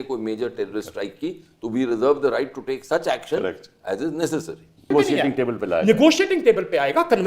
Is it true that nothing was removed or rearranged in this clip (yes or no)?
no